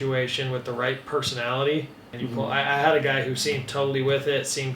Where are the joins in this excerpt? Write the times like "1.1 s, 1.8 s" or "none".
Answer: 2.1 s